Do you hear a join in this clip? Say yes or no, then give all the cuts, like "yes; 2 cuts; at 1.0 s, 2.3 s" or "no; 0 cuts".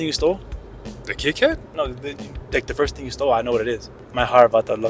yes; 1 cut; at 4.0 s